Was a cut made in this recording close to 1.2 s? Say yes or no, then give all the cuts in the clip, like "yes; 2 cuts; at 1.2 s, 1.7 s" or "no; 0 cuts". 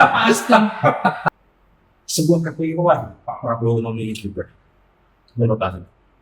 yes; 1 cut; at 1.2 s